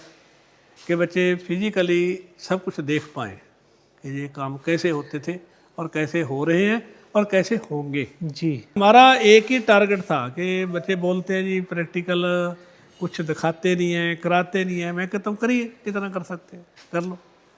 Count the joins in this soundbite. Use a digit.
1